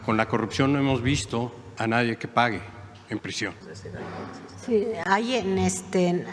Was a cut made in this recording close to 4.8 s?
no; 2 cuts; at 1.6 s, 3.6 s

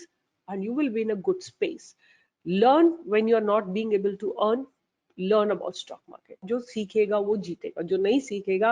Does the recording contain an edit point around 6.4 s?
yes; 1 cut; at 6.4 s

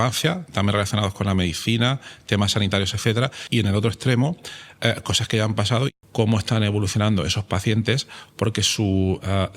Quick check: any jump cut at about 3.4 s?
yes; 2 cuts; at 3.4 s, 5.9 s

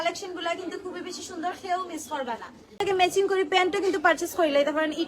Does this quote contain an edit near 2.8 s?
yes; 1 cut; at 2.8 s

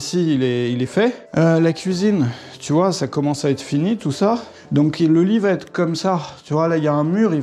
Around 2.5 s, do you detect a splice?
no; 2 cuts; at 1.2 s, 4.5 s

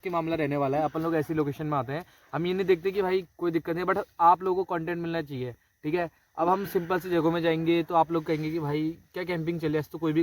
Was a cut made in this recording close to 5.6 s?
no; 0 cuts

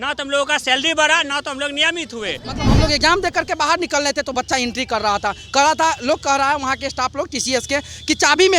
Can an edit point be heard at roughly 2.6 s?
yes; 1 cut; at 2.6 s

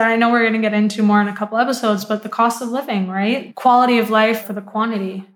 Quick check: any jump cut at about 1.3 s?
no; 2 cuts; at 3.5 s, 4.4 s

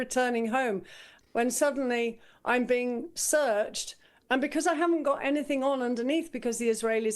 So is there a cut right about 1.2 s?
yes; 1 cut; at 1.2 s

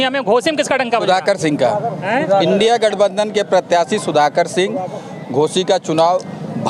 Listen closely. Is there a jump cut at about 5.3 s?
no; 0 cuts

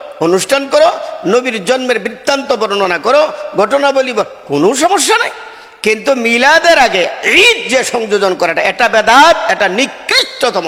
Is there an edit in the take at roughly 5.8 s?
no; 0 cuts

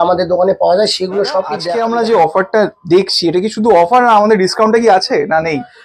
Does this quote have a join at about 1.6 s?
yes; 1 cut; at 1.6 s

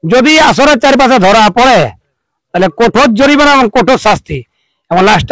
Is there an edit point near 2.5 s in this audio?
no; 0 cuts

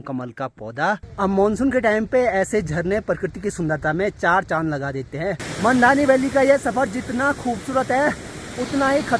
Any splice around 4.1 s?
no; 2 cuts; at 1.1 s, 5.5 s

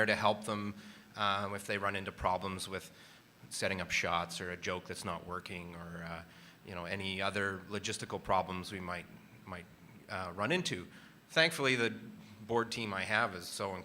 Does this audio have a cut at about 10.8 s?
yes; 1 cut; at 10.8 s

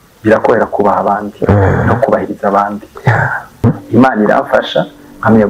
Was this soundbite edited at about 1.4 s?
no; 1 cut; at 3.6 s

